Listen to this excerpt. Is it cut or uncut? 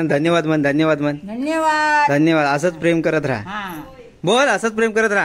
uncut